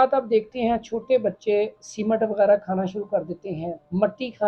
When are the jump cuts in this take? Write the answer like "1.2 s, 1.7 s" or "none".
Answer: none